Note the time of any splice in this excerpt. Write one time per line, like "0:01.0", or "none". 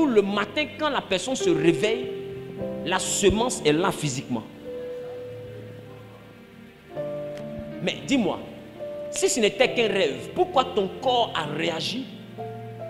none